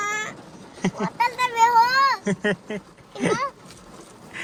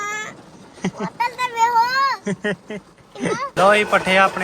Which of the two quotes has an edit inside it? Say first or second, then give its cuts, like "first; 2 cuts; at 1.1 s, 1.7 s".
second; 1 cut; at 3.5 s